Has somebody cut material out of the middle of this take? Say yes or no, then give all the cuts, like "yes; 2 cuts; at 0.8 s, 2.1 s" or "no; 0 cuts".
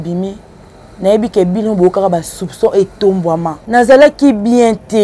yes; 1 cut; at 3.6 s